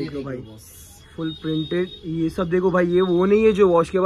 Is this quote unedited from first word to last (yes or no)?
yes